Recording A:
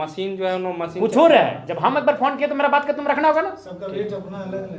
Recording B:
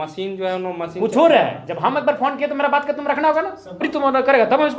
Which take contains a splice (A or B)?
B